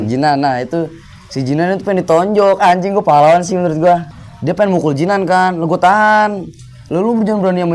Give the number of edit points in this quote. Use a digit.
1